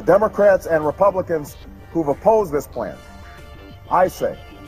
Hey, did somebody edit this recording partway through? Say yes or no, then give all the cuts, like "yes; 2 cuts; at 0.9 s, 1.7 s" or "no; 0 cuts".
no; 0 cuts